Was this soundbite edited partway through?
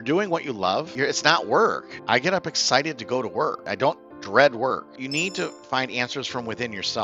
yes; 4 cuts; at 0.9 s, 1.9 s, 3.6 s, 5.0 s

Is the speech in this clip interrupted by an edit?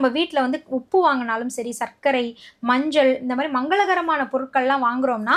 no; 0 cuts

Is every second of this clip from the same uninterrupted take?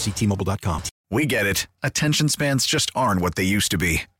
no; 1 cut; at 0.9 s

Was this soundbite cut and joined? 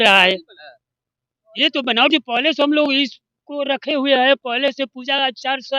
no; 0 cuts

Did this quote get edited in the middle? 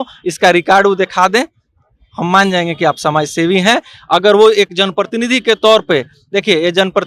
no; 0 cuts

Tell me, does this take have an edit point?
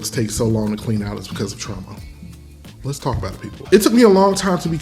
yes; 1 cut; at 3.6 s

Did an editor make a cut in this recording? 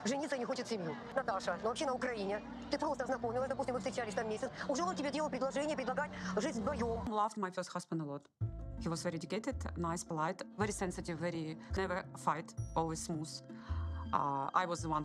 yes; 1 cut; at 7.5 s

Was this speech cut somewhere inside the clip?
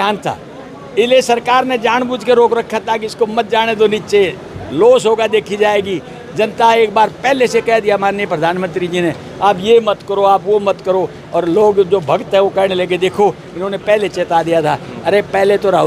no; 0 cuts

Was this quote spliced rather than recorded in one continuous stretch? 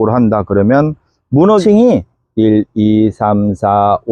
yes; 1 cut; at 1.6 s

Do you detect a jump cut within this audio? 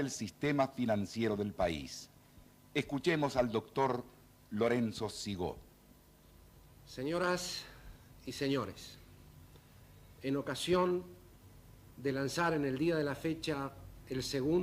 yes; 1 cut; at 5.4 s

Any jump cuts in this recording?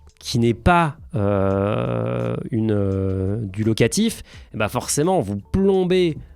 no; 0 cuts

